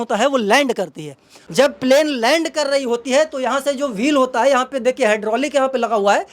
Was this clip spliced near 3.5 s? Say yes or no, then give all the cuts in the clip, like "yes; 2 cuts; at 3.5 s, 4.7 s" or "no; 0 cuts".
no; 1 cut; at 1.3 s